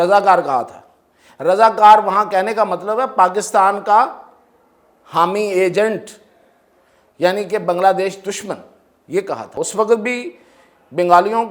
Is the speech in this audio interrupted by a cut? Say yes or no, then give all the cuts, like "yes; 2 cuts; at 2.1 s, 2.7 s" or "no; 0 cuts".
yes; 1 cut; at 9.6 s